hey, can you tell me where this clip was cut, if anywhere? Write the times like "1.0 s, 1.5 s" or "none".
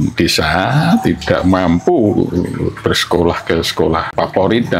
none